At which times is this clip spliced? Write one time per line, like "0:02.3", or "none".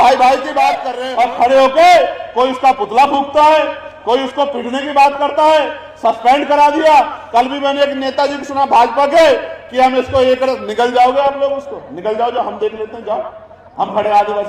0:00.9

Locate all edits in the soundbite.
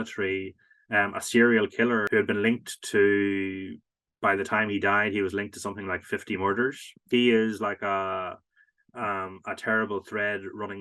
0:02.0
0:07.1

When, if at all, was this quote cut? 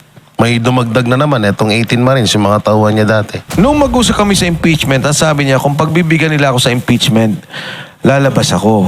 0:03.4

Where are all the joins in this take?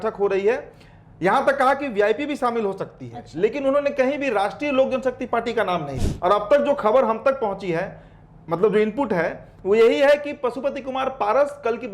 0:06.0

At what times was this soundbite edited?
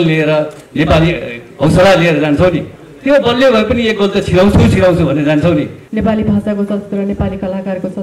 0:05.8

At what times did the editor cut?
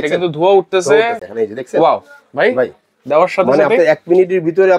0:01.2

